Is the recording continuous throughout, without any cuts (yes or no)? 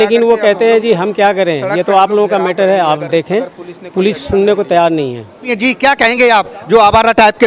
yes